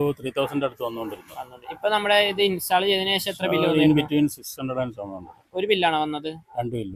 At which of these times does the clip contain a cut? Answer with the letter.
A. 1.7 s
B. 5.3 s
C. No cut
C